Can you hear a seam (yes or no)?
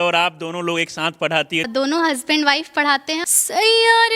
yes